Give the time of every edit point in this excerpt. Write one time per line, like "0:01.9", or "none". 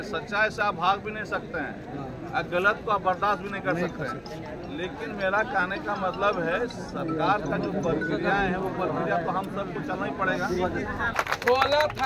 0:11.1